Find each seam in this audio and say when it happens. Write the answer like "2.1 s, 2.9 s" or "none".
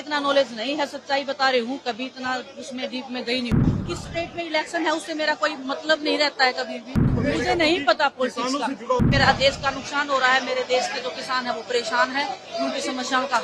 3.6 s, 7.0 s, 9.0 s